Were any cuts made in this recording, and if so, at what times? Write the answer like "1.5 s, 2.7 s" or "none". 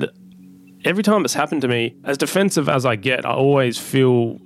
2.0 s